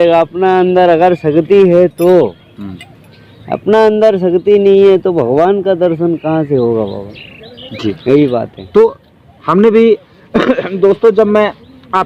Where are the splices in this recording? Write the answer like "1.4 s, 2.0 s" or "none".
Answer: none